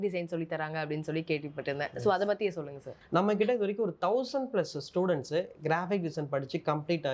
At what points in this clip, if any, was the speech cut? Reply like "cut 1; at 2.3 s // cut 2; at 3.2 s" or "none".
cut 1; at 3.0 s